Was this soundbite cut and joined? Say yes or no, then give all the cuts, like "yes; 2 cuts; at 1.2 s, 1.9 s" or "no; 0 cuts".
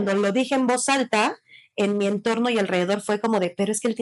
no; 0 cuts